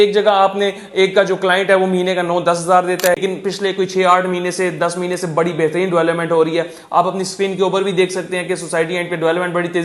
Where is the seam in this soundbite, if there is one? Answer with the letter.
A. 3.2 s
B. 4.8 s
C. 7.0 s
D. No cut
A